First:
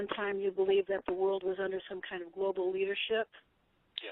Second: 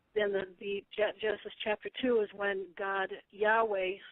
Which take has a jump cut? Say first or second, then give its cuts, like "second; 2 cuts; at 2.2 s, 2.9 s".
second; 1 cut; at 2.6 s